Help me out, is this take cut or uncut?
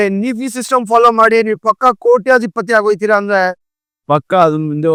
uncut